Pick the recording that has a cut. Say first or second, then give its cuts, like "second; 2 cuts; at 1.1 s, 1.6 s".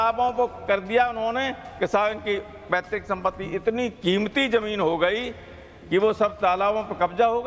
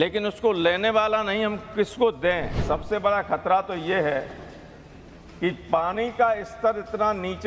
second; 1 cut; at 2.6 s